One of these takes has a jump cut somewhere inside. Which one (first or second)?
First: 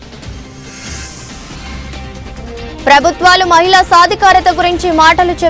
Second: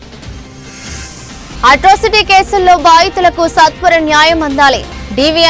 second